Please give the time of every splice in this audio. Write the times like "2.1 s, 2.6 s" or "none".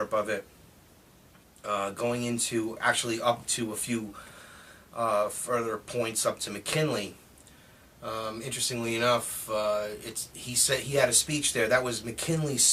none